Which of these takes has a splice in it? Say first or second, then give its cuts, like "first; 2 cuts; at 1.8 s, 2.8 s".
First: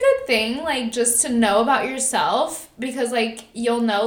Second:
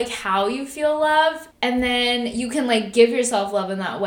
second; 1 cut; at 1.5 s